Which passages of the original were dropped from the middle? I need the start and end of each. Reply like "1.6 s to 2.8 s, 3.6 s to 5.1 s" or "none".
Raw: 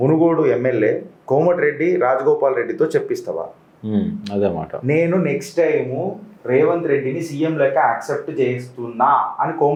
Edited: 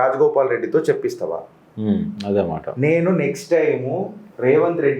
none